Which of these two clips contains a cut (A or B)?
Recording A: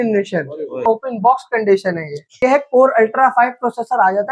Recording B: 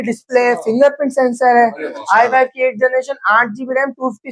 A